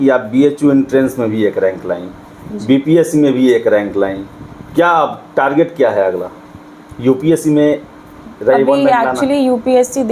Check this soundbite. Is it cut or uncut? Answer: uncut